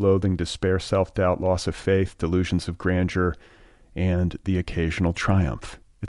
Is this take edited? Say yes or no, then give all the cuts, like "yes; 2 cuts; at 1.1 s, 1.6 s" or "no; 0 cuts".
no; 0 cuts